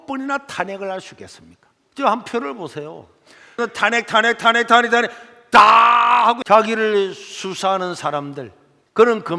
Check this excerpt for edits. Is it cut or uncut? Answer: cut